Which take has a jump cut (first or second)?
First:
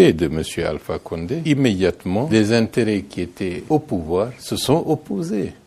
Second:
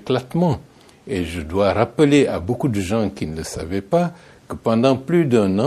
first